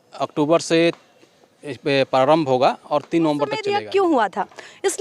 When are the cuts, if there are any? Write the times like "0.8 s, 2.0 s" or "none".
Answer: 3.7 s